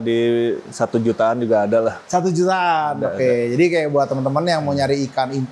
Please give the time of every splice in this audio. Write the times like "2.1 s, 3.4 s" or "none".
none